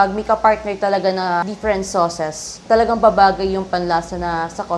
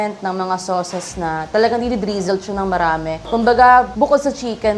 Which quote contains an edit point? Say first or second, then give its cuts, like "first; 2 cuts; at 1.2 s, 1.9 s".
first; 2 cuts; at 1.4 s, 2.6 s